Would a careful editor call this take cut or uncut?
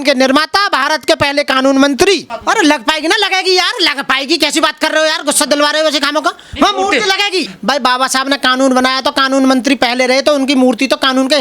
cut